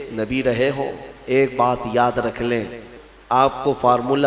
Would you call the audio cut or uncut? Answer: cut